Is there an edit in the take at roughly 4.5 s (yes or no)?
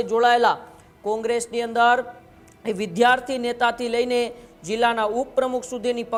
no